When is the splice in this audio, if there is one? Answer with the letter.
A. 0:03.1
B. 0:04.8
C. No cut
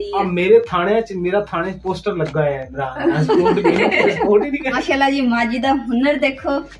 B